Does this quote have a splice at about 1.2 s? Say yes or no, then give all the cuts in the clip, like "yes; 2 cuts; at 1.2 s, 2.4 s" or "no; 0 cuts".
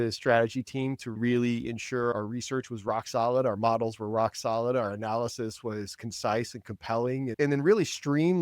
yes; 2 cuts; at 1.2 s, 7.3 s